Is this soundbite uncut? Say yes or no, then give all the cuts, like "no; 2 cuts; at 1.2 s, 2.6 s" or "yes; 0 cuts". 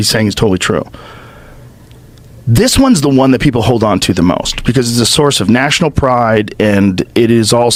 yes; 0 cuts